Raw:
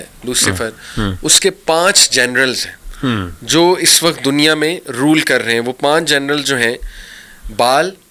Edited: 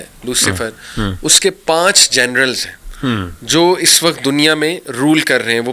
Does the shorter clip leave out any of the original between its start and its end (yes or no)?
no